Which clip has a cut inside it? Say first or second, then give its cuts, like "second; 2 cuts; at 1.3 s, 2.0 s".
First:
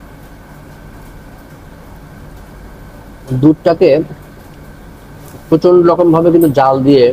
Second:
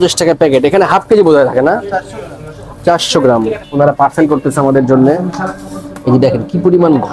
second; 1 cut; at 3.6 s